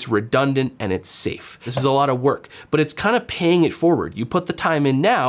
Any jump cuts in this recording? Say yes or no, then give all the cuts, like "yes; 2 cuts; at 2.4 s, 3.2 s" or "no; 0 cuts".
yes; 1 cut; at 1.6 s